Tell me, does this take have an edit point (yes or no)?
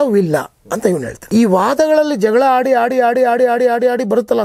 yes